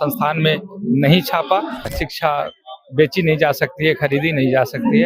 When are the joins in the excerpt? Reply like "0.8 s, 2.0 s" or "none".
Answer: 1.9 s